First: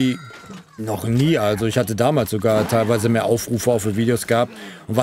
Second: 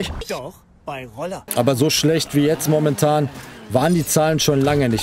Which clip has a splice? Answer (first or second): second